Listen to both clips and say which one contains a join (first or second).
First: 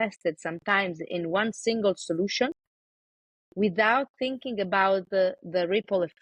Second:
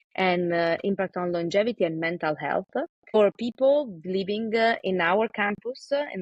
second